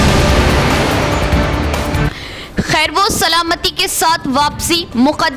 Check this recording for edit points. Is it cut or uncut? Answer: cut